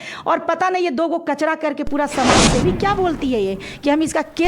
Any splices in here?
yes; 1 cut; at 2.6 s

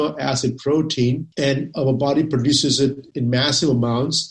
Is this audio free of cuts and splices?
no; 2 cuts; at 1.3 s, 3.1 s

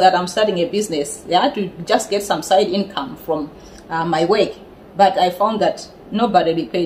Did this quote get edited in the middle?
no; 0 cuts

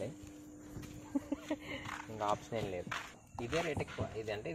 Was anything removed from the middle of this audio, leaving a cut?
yes; 1 cut; at 3.2 s

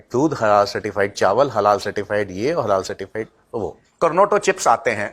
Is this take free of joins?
no; 1 cut; at 3.8 s

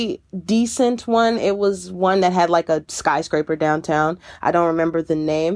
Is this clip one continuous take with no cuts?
yes; 0 cuts

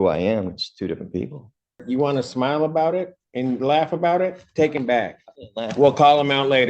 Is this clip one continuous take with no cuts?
no; 1 cut; at 1.8 s

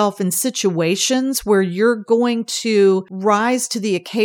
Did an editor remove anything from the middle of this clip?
yes; 1 cut; at 3.1 s

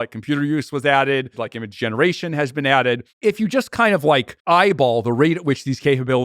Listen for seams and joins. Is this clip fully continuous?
no; 3 cuts; at 1.5 s, 3.1 s, 4.3 s

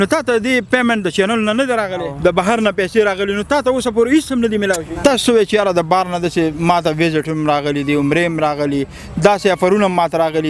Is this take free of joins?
no; 2 cuts; at 2.1 s, 4.9 s

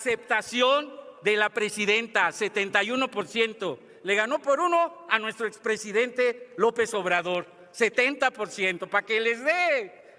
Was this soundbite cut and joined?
no; 0 cuts

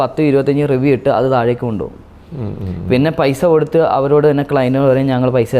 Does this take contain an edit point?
no; 0 cuts

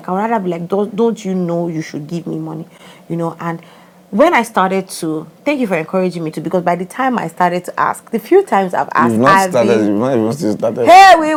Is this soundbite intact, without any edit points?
yes; 0 cuts

